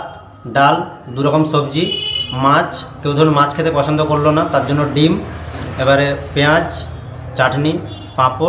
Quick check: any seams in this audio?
no; 0 cuts

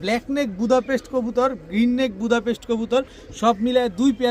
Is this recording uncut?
yes; 0 cuts

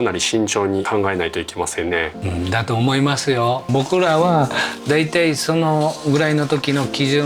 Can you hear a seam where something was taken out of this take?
yes; 3 cuts; at 0.9 s, 2.2 s, 3.7 s

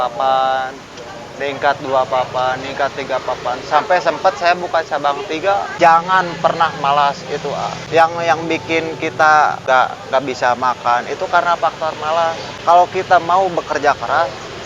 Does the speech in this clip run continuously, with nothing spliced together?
no; 4 cuts; at 5.7 s, 7.8 s, 9.6 s, 12.5 s

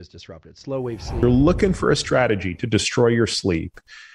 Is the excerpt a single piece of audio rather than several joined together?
no; 1 cut; at 1.2 s

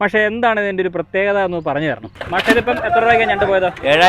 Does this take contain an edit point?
yes; 1 cut; at 2.1 s

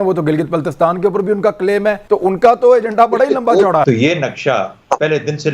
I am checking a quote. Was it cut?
yes; 2 cuts; at 2.0 s, 3.8 s

